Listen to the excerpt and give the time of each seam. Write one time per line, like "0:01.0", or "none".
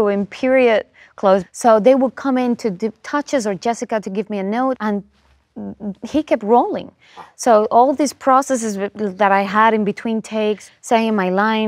0:01.5
0:04.8
0:10.6